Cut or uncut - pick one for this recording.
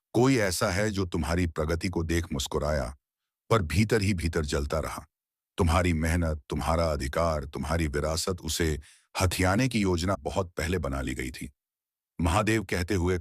cut